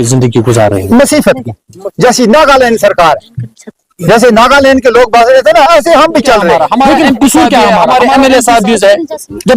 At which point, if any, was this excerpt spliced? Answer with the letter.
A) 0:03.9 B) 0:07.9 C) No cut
B